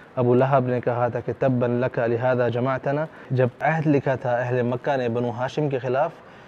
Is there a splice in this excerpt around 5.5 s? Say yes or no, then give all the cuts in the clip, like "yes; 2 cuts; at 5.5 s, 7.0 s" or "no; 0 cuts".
no; 1 cut; at 3.3 s